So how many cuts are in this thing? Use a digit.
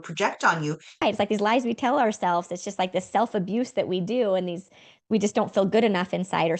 1